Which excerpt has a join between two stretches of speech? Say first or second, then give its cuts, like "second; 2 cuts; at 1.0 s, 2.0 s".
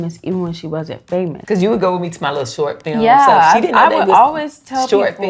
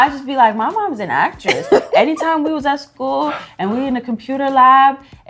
first; 1 cut; at 1.4 s